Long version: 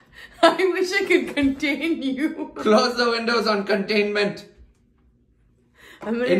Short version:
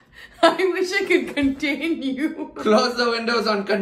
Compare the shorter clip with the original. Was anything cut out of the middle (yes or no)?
no